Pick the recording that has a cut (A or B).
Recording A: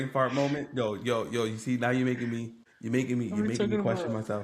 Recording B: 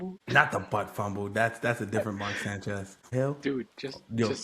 B